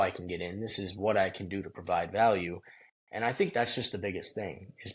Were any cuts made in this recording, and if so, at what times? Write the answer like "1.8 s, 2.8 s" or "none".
none